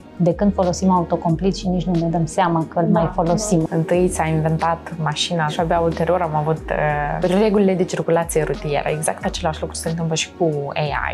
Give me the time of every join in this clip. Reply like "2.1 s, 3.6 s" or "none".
3.6 s, 5.5 s, 7.2 s